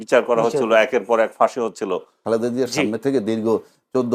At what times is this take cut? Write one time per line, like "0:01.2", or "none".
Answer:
0:02.2